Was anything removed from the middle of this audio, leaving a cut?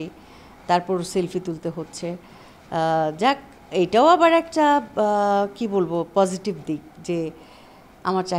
no; 0 cuts

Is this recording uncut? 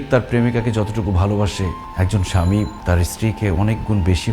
no; 2 cuts; at 1.8 s, 2.8 s

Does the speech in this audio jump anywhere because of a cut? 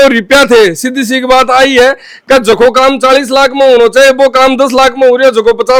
no; 0 cuts

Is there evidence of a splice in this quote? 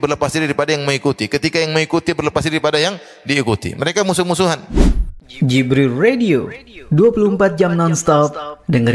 yes; 1 cut; at 4.6 s

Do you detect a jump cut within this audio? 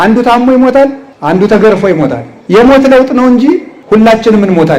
yes; 3 cuts; at 1.1 s, 2.3 s, 3.7 s

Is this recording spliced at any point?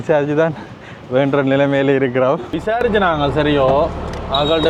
yes; 1 cut; at 2.5 s

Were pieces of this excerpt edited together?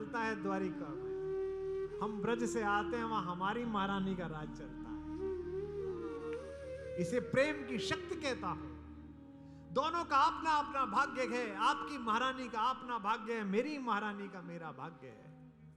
yes; 1 cut; at 6.1 s

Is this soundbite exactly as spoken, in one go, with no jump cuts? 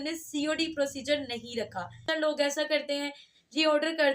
no; 1 cut; at 2.0 s

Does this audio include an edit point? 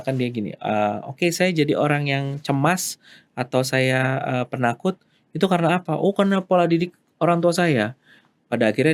no; 0 cuts

